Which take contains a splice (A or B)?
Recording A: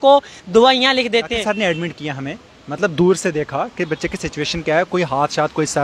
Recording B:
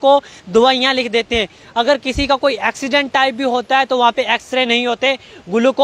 A